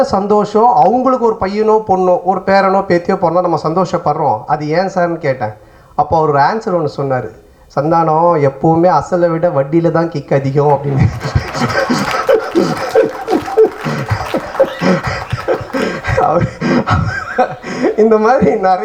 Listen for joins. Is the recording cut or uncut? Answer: uncut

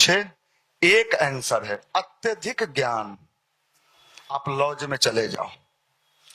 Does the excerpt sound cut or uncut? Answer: uncut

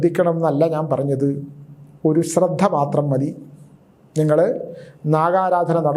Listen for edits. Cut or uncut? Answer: uncut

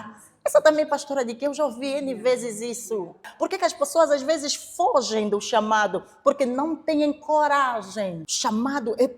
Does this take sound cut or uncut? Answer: cut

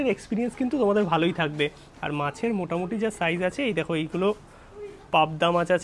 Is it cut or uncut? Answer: uncut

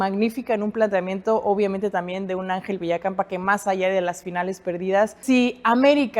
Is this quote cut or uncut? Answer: cut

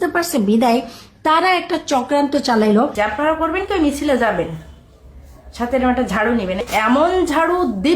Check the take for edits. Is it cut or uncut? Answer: cut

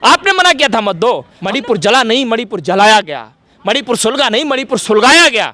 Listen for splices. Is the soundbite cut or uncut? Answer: cut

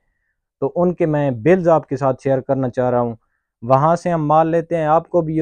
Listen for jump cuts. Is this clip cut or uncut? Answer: uncut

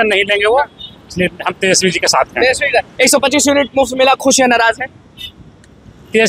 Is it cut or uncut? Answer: uncut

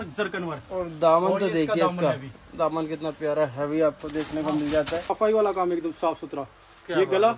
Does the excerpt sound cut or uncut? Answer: cut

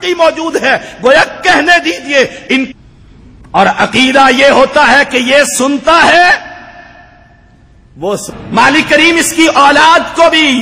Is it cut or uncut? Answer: cut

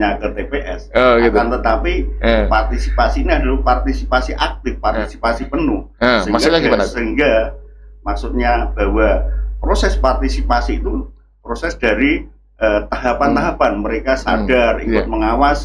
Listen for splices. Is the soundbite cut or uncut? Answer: uncut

